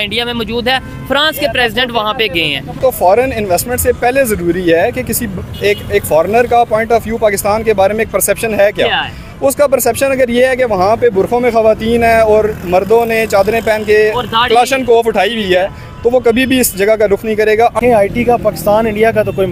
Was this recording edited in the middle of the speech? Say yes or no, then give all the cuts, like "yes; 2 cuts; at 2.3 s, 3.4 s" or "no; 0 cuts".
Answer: yes; 2 cuts; at 2.8 s, 17.8 s